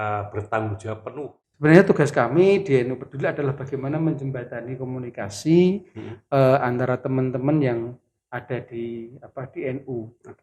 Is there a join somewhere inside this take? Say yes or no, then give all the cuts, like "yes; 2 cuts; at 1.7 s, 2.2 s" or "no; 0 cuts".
yes; 1 cut; at 1.2 s